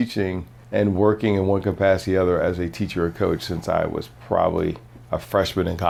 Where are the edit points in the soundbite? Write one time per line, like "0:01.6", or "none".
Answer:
none